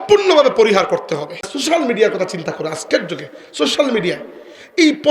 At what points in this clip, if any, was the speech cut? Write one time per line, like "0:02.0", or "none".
0:01.5